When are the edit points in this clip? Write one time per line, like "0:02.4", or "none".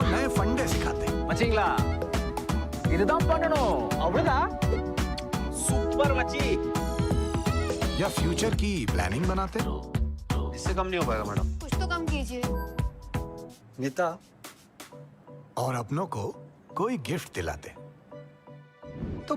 none